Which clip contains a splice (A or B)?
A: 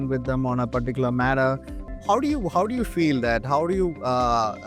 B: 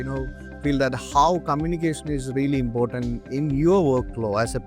A